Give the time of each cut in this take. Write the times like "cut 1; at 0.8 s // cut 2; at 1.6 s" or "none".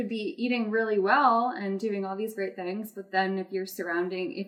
none